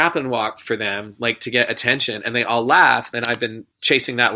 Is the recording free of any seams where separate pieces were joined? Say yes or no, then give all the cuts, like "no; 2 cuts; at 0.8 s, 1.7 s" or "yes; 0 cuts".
no; 1 cut; at 3.1 s